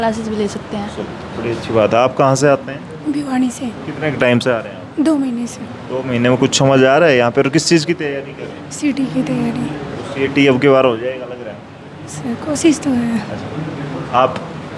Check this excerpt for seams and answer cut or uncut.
uncut